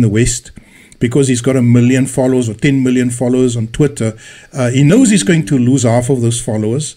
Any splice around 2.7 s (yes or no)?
yes